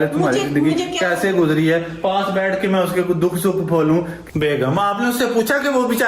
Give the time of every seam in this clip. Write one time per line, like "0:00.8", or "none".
0:04.2